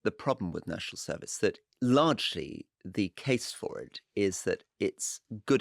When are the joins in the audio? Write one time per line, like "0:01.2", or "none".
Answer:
0:01.7